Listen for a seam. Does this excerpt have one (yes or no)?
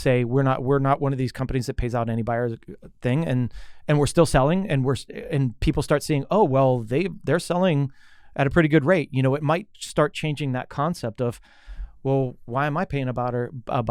no